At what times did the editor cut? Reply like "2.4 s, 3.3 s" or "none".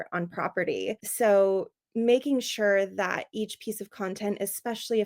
1.0 s